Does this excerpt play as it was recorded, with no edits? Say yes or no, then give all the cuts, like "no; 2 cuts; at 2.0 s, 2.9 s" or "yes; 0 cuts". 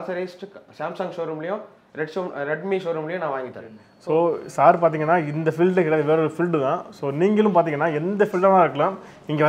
no; 1 cut; at 3.9 s